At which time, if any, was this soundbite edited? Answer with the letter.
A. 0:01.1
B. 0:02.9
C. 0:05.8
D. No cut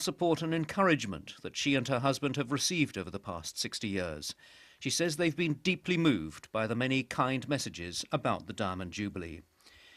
A